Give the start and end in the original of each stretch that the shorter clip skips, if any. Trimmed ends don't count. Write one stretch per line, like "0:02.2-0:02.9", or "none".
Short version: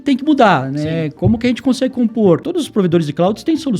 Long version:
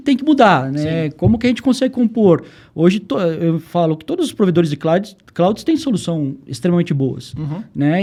0:02.8-0:05.0

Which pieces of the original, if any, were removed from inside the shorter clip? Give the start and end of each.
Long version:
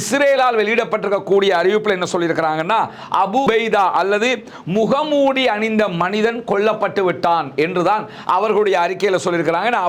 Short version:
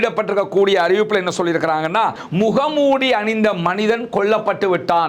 0:03.0-0:04.6

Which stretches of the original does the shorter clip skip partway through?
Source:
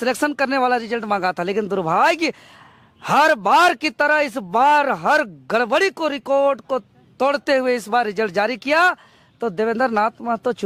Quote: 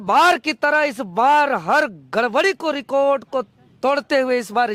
none

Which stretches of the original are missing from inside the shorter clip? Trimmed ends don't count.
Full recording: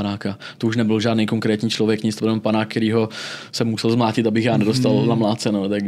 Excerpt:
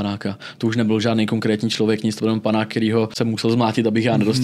0:03.1-0:03.5

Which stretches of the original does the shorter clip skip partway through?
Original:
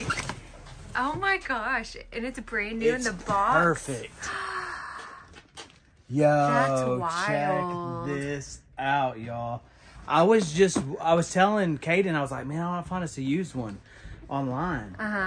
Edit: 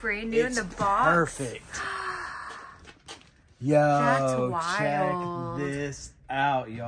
none

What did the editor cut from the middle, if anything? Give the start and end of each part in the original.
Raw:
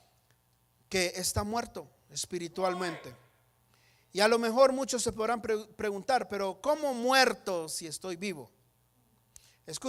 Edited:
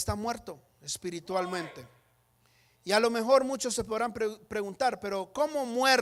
none

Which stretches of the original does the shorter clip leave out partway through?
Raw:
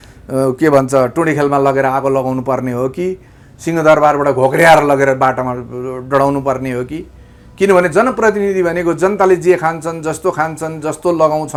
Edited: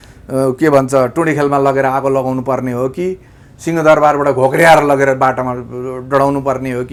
none

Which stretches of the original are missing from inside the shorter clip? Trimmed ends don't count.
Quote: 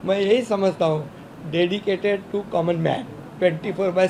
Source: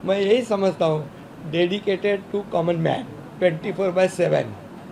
none

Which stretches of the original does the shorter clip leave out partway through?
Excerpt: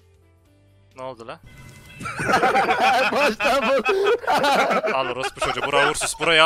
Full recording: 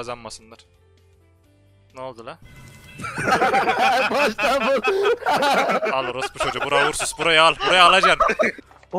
none

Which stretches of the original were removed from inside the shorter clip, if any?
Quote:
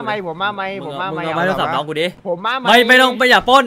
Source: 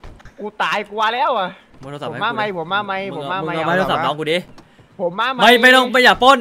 0:04.5-0:04.9

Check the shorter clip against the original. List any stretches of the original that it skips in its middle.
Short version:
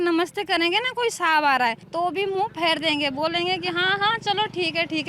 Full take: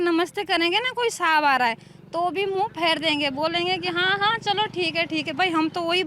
0:01.8-0:02.0

